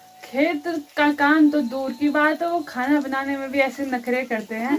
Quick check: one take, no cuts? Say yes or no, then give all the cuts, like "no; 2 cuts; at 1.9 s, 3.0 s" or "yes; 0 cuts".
yes; 0 cuts